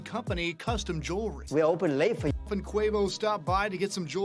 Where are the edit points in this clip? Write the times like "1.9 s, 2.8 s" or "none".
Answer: 2.4 s

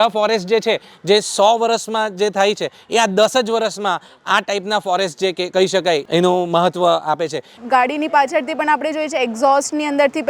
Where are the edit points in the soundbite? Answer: 6.0 s, 7.6 s

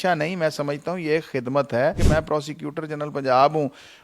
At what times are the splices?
2.0 s

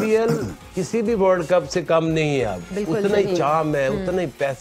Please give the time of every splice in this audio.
none

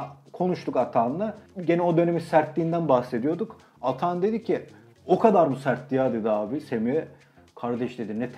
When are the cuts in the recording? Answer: 1.5 s

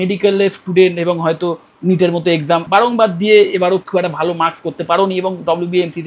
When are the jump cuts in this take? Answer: 2.6 s, 3.9 s

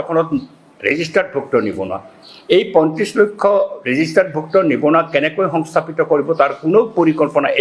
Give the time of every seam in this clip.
none

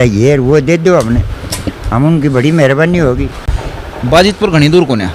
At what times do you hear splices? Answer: 3.5 s

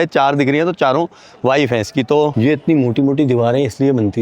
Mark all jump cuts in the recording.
2.3 s

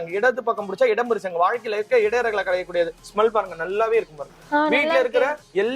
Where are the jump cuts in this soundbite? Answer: 3.0 s

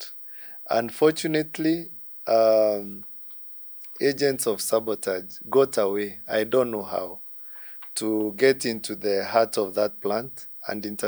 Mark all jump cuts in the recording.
none

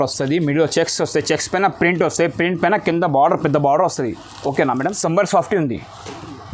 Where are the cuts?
5.0 s

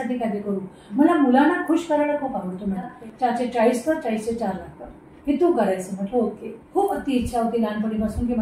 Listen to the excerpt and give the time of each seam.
2.9 s, 6.6 s

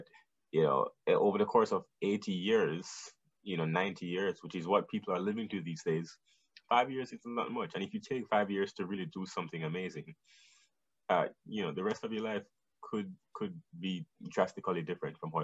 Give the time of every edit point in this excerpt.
none

